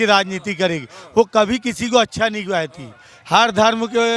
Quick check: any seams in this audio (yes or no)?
no